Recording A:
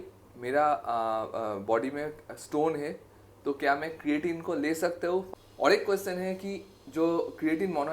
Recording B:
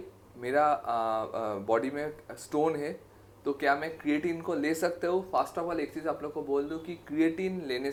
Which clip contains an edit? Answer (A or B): A